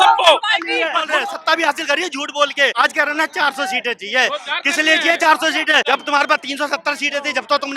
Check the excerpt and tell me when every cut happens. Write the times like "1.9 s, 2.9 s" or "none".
1.0 s, 2.7 s, 5.8 s